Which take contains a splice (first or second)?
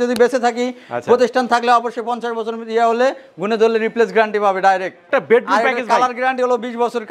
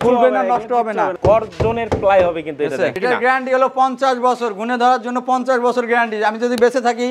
second